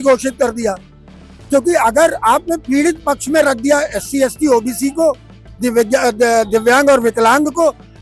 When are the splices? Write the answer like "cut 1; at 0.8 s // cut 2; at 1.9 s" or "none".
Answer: none